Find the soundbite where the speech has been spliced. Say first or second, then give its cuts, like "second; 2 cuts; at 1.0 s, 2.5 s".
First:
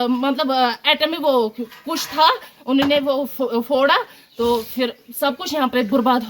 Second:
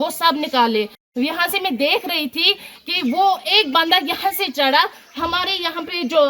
second; 1 cut; at 1.0 s